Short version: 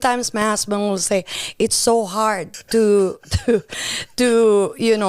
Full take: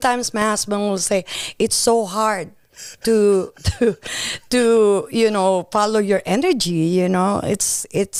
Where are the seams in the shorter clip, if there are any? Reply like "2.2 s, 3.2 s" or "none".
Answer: 2.5 s